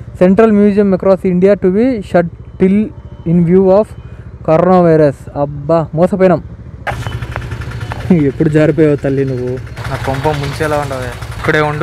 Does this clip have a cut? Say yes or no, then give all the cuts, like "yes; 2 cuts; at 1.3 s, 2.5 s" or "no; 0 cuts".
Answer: yes; 1 cut; at 6.9 s